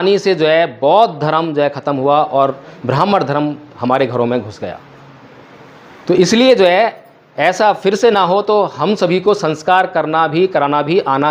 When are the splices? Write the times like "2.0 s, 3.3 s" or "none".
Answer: none